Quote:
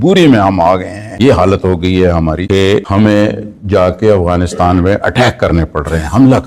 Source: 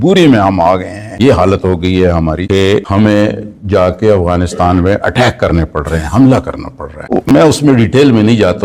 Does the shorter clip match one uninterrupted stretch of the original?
yes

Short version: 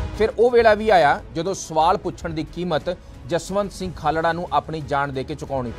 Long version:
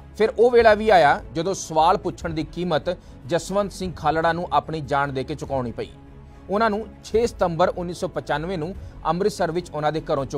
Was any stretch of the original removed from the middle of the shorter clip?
no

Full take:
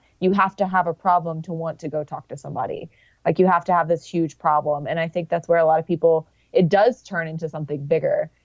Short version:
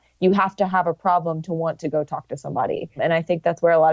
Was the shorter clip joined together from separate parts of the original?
yes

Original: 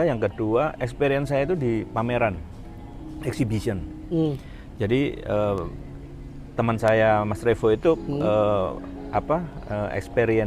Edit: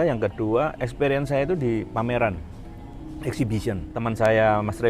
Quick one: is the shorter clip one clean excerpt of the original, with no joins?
no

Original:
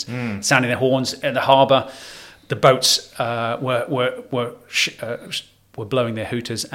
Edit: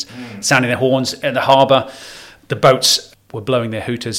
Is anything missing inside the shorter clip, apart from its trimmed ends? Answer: yes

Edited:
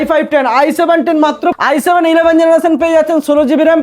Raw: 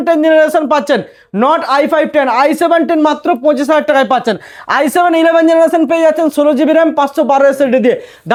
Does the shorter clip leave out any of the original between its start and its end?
yes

